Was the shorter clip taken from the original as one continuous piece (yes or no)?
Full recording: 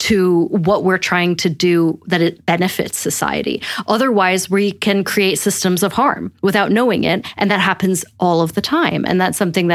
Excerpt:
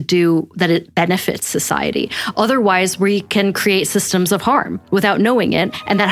yes